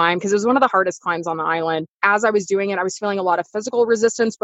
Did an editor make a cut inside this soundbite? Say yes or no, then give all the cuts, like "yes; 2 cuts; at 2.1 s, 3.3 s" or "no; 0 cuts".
yes; 1 cut; at 1.9 s